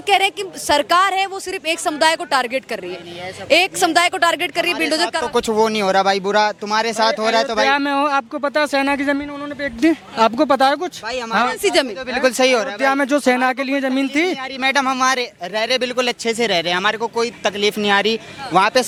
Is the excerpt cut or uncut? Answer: uncut